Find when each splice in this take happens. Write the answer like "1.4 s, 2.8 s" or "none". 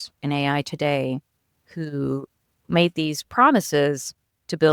none